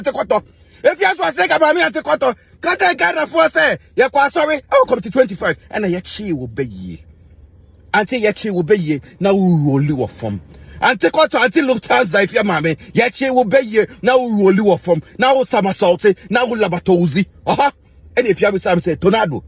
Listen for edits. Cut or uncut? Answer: uncut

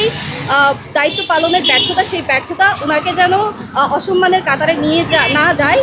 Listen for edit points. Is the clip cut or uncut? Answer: uncut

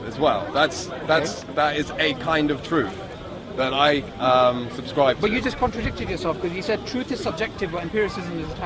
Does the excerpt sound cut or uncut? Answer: uncut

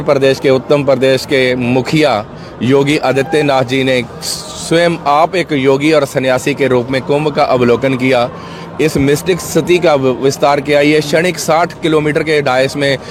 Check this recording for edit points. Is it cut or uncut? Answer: uncut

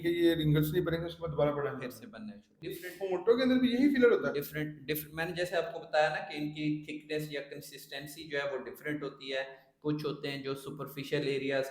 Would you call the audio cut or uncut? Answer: cut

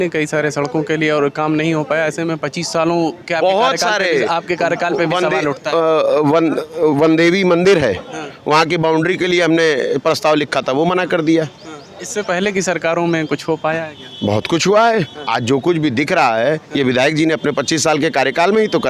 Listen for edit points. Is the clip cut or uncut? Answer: uncut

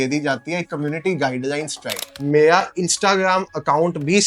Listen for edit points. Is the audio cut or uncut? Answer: cut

